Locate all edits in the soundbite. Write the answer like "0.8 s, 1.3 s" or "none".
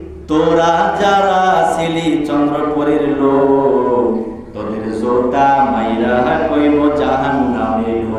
none